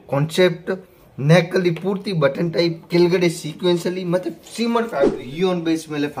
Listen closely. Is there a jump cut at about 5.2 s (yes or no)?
yes